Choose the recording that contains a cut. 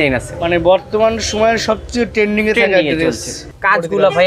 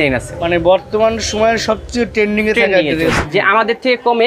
second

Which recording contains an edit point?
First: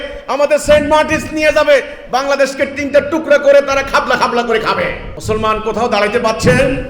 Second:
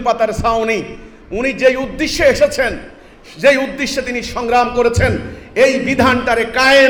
first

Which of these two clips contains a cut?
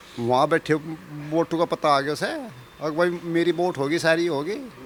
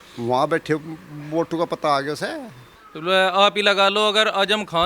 second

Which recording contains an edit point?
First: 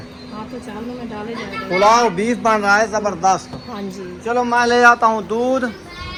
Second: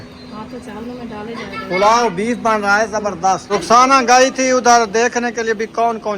second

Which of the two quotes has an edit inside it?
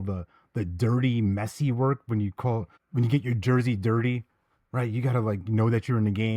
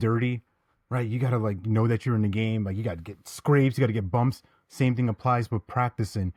first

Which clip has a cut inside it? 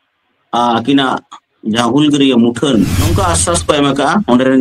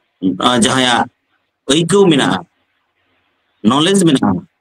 first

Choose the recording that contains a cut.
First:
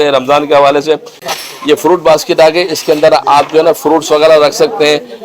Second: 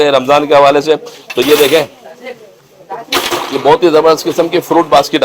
first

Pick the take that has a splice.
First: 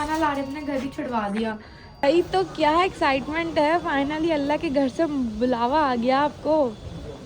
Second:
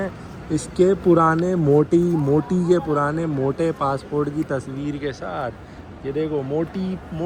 first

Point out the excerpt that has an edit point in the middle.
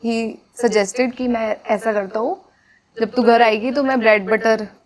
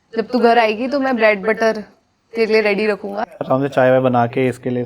second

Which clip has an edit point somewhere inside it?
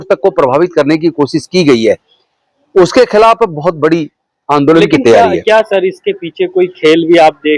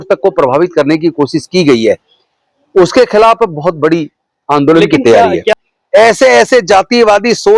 second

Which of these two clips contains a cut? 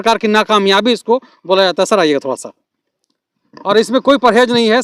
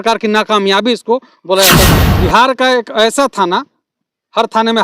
second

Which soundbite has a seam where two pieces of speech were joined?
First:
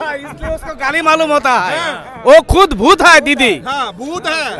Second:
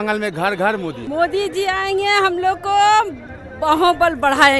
second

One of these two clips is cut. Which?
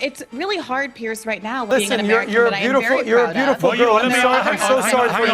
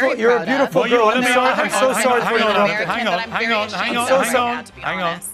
first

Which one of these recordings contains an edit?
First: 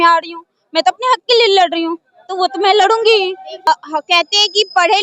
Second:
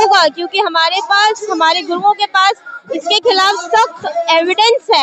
first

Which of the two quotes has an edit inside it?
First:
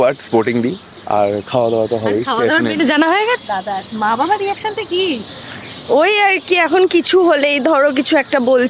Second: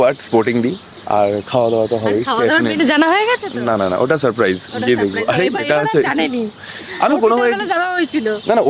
first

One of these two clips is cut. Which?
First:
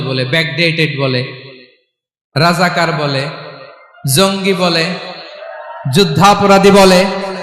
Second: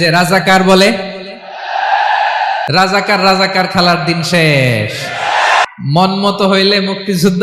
second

